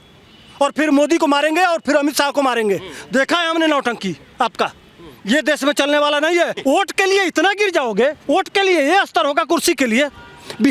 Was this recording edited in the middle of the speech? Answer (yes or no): yes